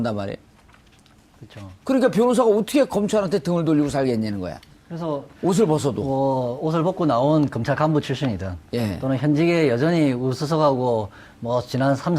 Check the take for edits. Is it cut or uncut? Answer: cut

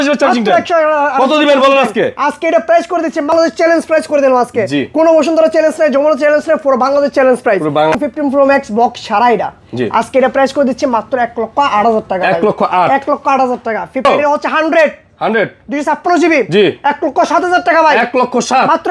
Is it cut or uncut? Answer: cut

